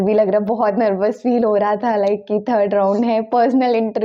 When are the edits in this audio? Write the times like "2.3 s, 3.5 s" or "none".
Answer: none